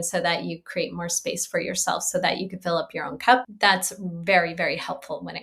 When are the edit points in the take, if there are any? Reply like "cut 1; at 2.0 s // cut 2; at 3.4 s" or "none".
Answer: cut 1; at 3.5 s